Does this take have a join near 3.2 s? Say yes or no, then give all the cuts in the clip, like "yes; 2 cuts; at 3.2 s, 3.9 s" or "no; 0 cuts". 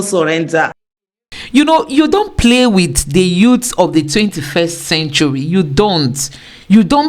no; 1 cut; at 1.0 s